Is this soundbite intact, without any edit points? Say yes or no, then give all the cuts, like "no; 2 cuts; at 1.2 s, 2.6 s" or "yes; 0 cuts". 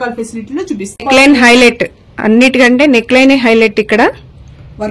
no; 1 cut; at 1.1 s